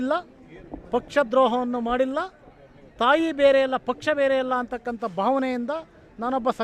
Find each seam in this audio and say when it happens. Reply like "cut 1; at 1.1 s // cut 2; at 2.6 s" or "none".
none